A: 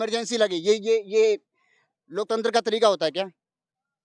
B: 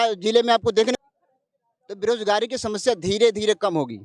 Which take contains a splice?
B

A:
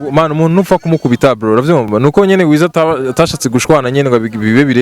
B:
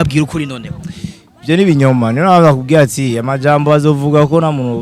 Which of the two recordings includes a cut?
A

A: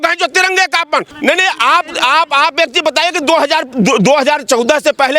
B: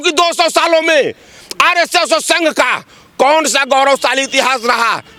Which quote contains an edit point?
A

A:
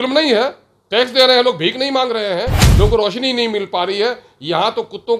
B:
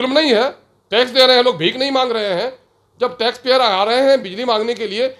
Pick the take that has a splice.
A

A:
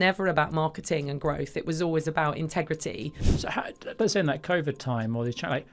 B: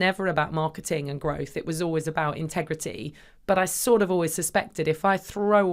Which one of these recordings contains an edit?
A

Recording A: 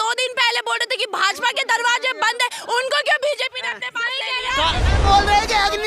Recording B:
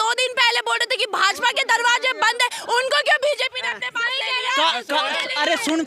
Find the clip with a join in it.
A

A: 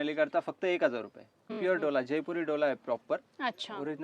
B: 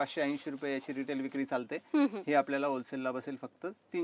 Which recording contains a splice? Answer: A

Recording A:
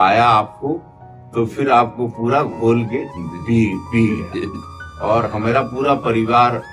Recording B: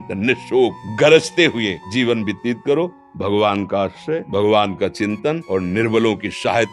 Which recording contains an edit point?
B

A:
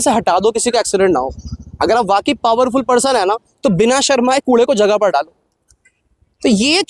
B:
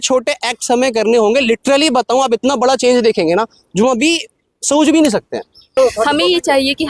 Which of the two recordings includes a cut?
B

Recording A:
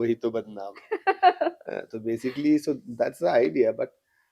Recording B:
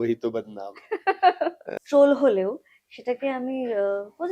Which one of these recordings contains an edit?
B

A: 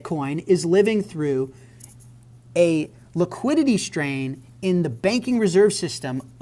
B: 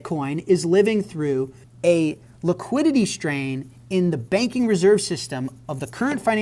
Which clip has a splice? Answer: B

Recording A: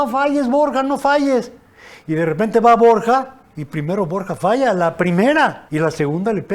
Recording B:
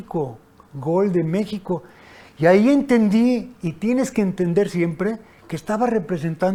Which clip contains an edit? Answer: A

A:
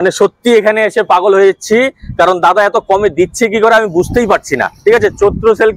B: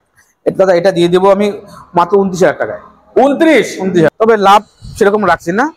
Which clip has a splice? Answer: B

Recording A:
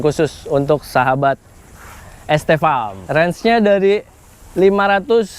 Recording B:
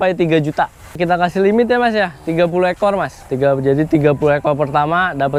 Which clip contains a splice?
A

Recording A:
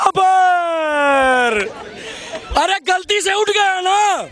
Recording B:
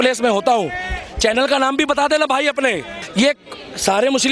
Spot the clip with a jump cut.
B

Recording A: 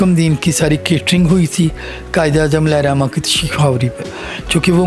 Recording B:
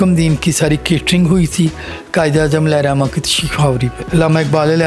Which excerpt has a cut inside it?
B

